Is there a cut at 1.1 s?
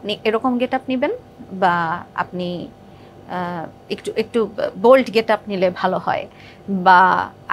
no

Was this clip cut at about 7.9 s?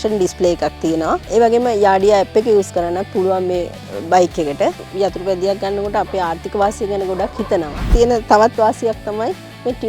yes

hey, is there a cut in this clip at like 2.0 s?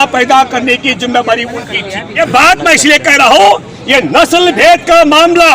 yes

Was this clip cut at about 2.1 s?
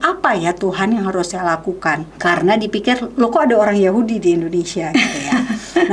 yes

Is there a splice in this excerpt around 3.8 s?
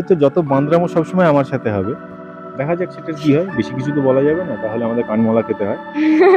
no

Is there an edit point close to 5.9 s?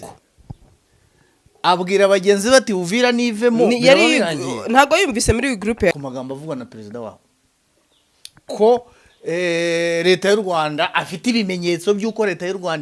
yes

